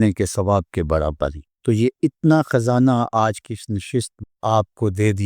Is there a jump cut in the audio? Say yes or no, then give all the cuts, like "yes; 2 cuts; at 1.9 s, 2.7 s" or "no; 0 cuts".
yes; 1 cut; at 4.2 s